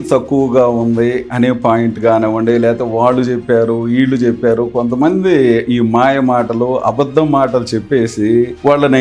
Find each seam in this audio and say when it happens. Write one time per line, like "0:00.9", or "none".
none